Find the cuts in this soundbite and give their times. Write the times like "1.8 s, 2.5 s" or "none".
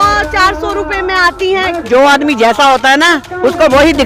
1.9 s